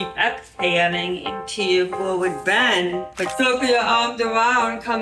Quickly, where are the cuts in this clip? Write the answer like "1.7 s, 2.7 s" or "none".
3.3 s